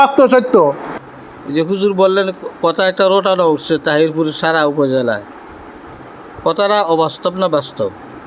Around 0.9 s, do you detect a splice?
yes; 1 cut; at 0.9 s

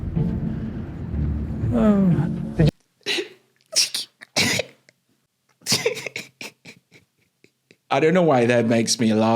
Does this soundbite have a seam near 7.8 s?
yes; 1 cut; at 7.8 s

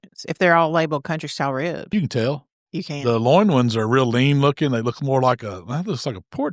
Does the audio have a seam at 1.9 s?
yes; 1 cut; at 1.9 s

